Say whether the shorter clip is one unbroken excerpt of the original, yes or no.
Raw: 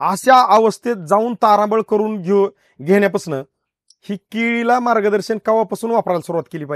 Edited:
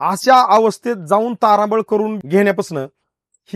no